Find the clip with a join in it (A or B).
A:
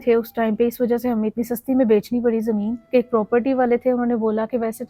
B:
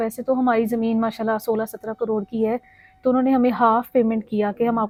A